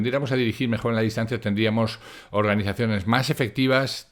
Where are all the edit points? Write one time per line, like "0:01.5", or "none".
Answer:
none